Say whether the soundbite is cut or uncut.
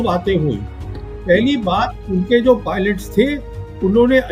uncut